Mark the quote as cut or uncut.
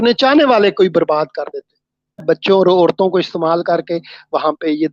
cut